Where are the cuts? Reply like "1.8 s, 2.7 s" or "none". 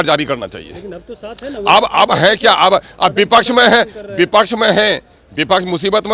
none